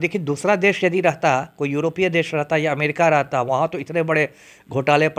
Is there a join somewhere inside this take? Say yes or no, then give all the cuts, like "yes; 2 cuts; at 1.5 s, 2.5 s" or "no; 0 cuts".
no; 0 cuts